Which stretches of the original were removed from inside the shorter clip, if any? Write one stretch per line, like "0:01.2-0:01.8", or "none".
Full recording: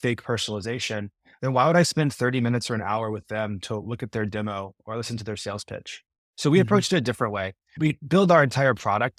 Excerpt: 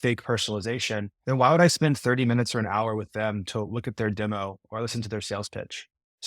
0:01.1-0:01.3